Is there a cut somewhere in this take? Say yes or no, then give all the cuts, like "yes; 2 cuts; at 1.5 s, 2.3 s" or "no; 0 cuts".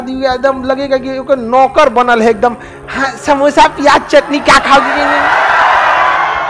no; 0 cuts